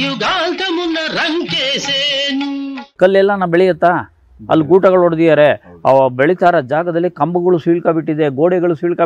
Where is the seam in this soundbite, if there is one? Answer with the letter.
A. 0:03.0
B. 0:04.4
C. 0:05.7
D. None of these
A